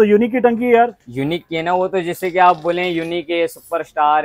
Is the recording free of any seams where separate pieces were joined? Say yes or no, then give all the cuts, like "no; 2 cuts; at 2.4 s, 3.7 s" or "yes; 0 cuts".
yes; 0 cuts